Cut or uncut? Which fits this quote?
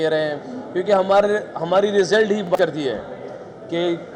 cut